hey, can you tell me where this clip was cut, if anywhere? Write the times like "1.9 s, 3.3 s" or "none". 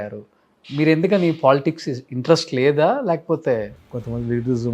3.7 s